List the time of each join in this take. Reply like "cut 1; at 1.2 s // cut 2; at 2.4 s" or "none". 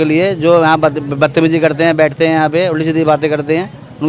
none